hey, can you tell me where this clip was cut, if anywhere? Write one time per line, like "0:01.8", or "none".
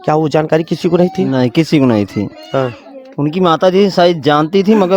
none